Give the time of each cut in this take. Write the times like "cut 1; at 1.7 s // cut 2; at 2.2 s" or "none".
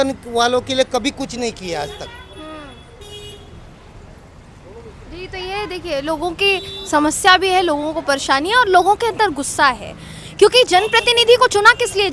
none